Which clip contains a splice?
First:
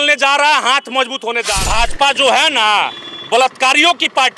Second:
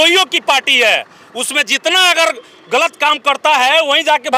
first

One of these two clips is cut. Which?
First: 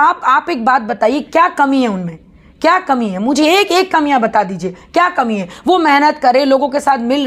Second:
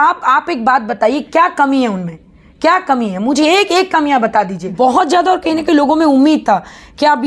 second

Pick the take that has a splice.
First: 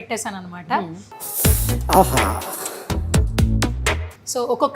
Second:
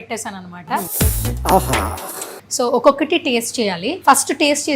second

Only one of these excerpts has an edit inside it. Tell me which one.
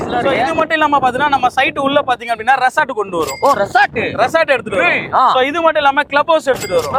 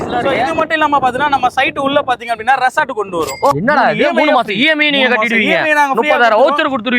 second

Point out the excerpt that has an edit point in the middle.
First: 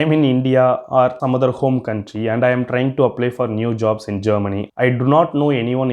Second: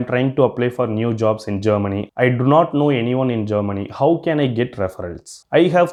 first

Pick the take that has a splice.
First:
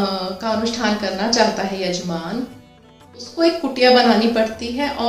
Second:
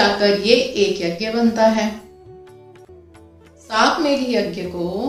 second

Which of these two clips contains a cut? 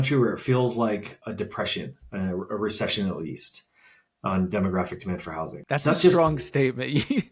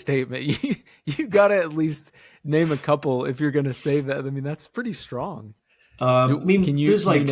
first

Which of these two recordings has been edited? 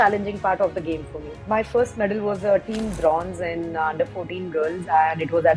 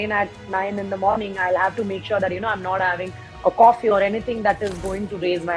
first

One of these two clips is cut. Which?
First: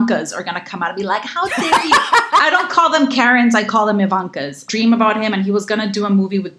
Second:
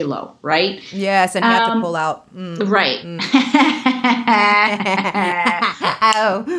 first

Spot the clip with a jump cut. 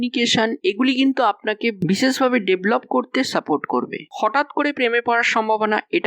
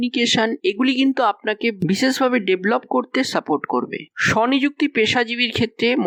first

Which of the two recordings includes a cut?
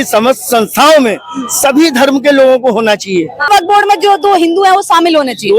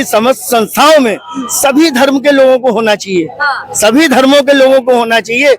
first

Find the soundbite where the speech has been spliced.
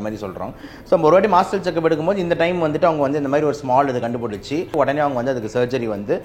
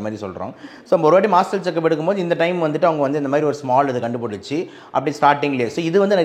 first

